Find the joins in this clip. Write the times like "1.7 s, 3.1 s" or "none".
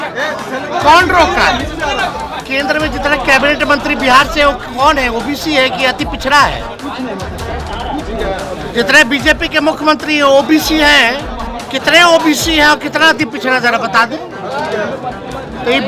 2.5 s

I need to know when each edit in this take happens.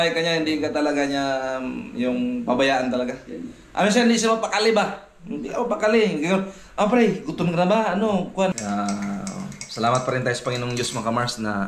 8.6 s

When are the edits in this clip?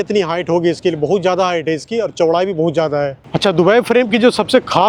3.2 s

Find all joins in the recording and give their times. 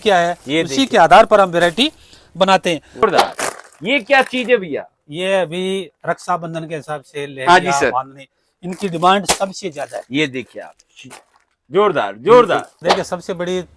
2.9 s, 12.7 s

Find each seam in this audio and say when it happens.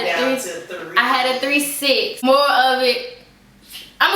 2.2 s

